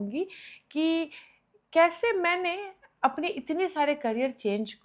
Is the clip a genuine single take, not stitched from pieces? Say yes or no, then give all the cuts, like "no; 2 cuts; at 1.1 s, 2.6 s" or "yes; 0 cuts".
yes; 0 cuts